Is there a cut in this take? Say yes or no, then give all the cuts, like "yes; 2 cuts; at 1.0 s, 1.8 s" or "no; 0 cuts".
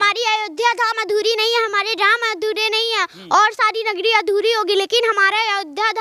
no; 0 cuts